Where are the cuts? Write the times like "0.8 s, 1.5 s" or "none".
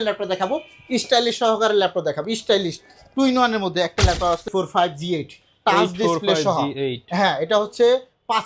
4.4 s